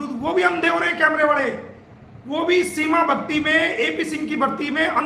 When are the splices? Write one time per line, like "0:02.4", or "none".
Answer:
none